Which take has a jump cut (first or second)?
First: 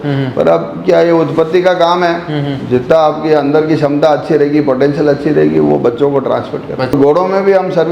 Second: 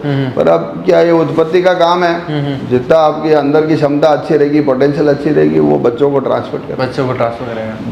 first